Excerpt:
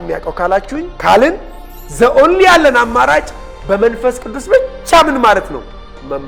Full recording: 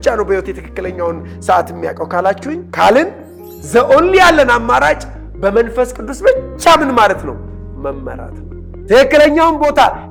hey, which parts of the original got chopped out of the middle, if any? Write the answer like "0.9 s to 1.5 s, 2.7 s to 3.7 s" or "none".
none